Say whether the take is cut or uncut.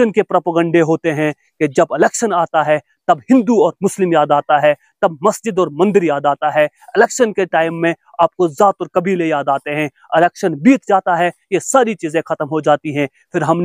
uncut